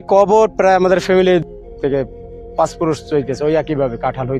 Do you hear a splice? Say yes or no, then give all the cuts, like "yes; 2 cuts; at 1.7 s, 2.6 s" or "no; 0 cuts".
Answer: no; 0 cuts